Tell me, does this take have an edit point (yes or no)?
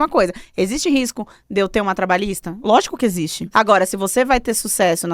yes